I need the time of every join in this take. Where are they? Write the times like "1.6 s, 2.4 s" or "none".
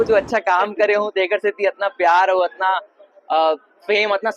none

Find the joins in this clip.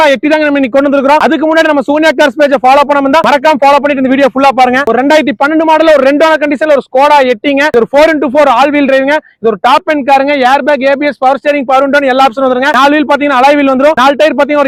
none

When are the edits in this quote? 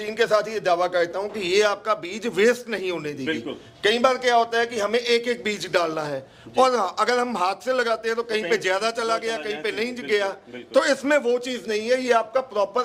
none

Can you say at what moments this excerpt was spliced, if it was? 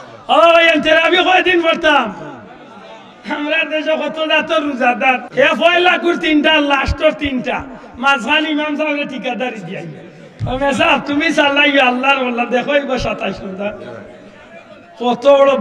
5.2 s

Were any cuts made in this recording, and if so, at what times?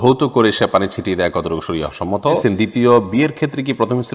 2.4 s

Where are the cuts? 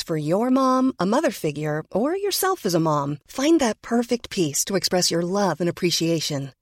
none

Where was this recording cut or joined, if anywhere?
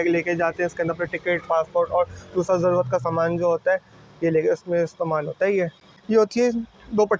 5.9 s

